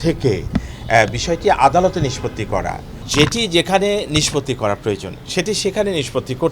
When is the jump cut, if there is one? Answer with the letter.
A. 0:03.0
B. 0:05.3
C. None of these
A